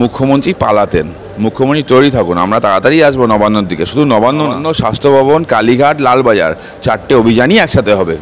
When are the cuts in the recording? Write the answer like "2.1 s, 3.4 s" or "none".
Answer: 4.7 s